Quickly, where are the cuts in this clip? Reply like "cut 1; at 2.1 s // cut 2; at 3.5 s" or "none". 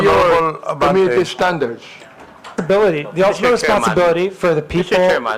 cut 1; at 2.6 s